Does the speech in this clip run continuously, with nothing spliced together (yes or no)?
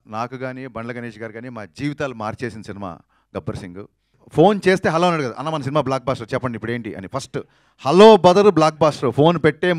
no